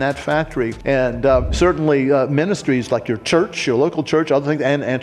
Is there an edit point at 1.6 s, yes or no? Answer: yes